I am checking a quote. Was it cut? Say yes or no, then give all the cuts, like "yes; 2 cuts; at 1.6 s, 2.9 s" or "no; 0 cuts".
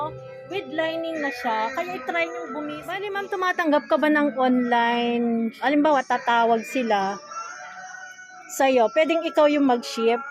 yes; 2 cuts; at 3.0 s, 5.5 s